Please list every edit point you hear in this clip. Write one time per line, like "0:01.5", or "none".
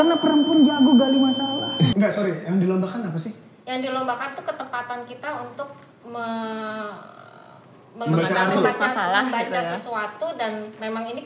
0:01.9